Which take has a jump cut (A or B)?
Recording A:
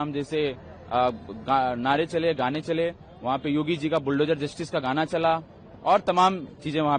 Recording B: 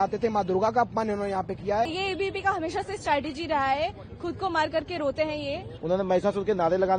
B